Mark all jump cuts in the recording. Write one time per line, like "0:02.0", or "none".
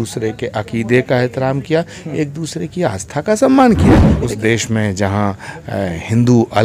0:04.1